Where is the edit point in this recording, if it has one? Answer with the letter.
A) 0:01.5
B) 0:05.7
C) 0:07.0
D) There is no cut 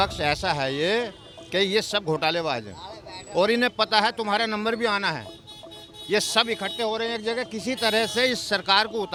D